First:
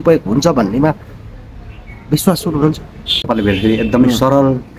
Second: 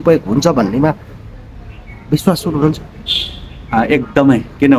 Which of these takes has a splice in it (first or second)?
first